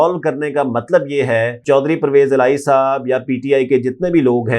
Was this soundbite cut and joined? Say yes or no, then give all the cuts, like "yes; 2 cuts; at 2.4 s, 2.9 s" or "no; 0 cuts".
yes; 1 cut; at 1.6 s